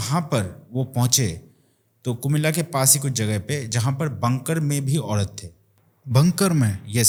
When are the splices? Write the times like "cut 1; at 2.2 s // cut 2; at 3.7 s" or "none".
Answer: none